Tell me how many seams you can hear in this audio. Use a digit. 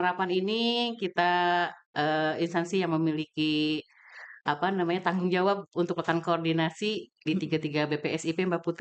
0